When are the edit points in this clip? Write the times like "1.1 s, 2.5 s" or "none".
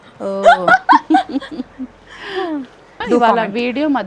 3.0 s